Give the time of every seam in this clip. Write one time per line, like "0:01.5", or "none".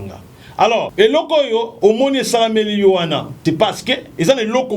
0:00.9
0:01.7
0:03.3